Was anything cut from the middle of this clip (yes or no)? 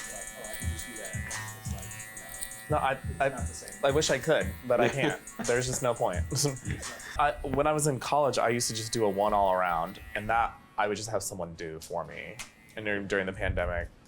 yes